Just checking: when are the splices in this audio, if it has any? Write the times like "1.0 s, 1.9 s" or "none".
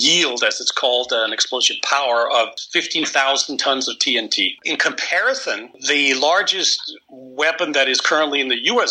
2.6 s, 4.6 s, 5.7 s